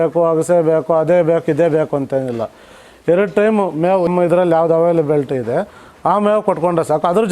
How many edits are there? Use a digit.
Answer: 1